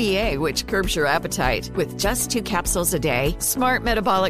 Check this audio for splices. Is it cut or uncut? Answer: uncut